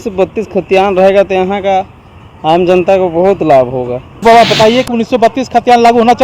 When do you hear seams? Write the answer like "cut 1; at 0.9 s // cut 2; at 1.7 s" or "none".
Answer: cut 1; at 4.0 s